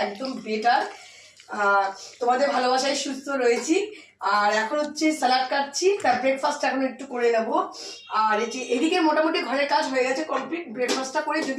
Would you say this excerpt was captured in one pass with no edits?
yes; 0 cuts

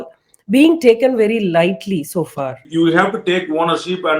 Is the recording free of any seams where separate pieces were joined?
no; 1 cut; at 2.6 s

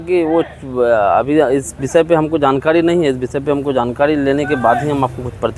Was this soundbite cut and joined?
no; 0 cuts

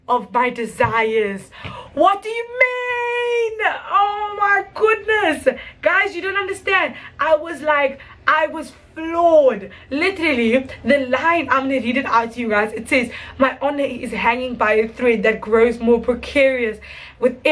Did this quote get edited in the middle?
no; 0 cuts

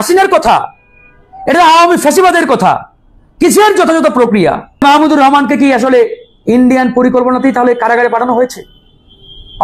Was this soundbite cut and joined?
yes; 1 cut; at 4.8 s

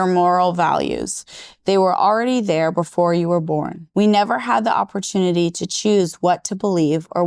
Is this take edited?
yes; 1 cut; at 3.8 s

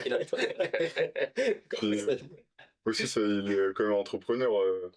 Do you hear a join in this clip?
no; 0 cuts

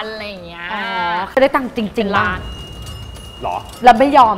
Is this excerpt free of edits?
no; 1 cut; at 1.4 s

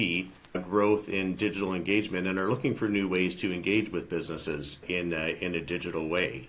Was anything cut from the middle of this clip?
yes; 1 cut; at 4.7 s

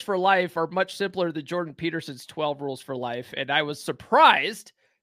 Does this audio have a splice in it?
no; 0 cuts

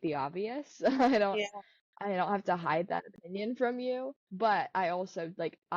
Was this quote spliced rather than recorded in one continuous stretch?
yes; 1 cut; at 4.2 s

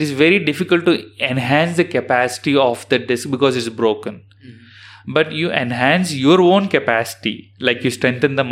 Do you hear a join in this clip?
no; 0 cuts

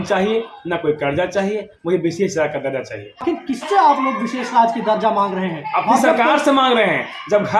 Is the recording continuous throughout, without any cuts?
no; 1 cut; at 3.2 s

